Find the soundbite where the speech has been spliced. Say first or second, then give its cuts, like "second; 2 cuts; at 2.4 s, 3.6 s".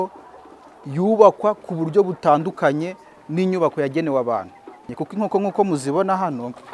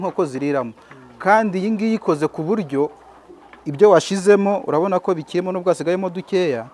first; 1 cut; at 5.0 s